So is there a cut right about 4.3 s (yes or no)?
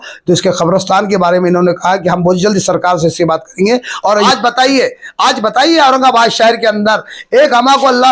yes